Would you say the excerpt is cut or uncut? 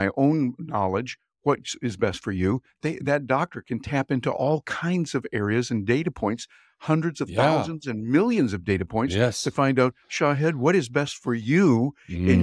uncut